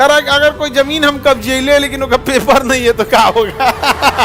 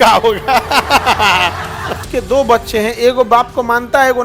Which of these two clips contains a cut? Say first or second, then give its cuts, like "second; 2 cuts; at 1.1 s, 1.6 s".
second; 1 cut; at 2.0 s